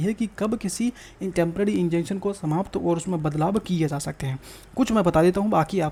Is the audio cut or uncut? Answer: uncut